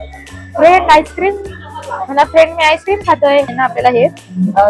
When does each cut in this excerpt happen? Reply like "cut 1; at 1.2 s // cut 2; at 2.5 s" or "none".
cut 1; at 3.5 s